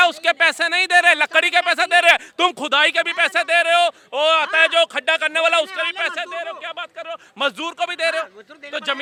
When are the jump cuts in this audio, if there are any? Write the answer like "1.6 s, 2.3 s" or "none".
none